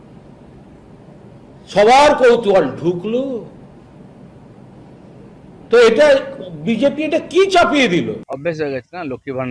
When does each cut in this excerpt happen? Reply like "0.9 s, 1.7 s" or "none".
8.2 s

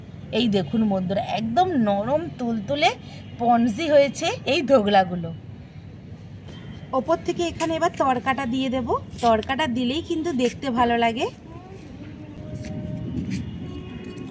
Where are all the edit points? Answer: 12.4 s

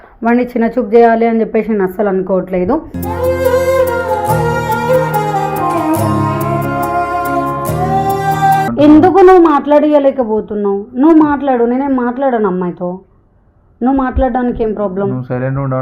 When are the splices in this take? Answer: 8.7 s

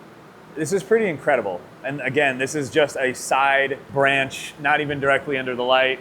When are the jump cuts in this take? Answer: 3.8 s

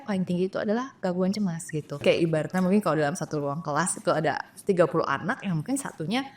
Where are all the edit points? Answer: 2.0 s

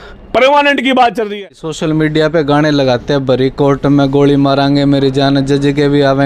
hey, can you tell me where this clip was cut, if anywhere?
1.6 s

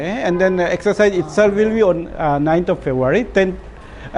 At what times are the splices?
none

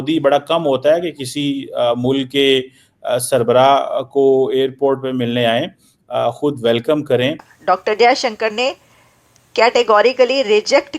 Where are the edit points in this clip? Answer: 7.5 s

